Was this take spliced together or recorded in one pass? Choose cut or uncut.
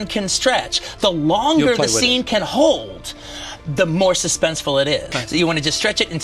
cut